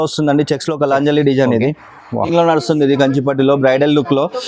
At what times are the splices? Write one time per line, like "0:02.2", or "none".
0:02.3